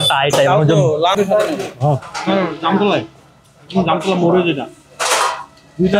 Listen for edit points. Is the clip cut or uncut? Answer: cut